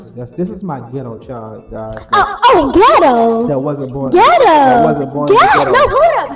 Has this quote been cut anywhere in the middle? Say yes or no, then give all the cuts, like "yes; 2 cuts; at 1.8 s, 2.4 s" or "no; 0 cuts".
no; 0 cuts